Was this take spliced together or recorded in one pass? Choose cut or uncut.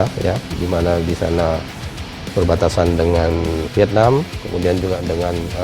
cut